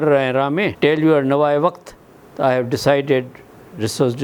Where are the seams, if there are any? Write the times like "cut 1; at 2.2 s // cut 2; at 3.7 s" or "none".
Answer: none